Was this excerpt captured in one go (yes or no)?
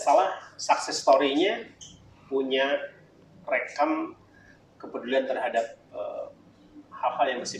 yes